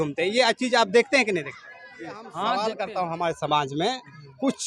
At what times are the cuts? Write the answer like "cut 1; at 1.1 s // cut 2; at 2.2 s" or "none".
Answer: cut 1; at 2.3 s